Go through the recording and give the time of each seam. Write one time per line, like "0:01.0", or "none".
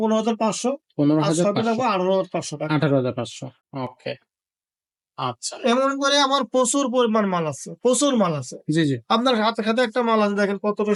none